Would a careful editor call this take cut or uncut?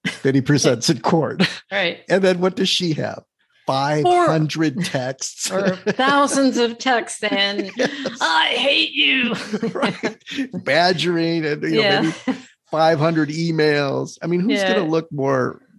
uncut